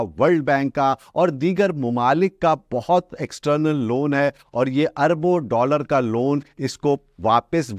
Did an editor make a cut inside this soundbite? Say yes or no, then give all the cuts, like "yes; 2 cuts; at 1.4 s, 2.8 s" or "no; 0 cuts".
no; 0 cuts